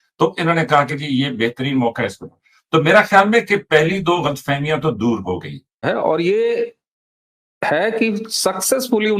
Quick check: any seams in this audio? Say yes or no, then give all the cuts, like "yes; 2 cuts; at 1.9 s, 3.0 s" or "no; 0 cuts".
yes; 1 cut; at 5.8 s